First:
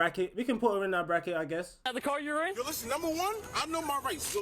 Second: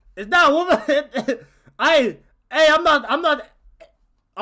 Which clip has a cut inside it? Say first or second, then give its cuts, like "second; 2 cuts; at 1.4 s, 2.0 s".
first; 1 cut; at 1.9 s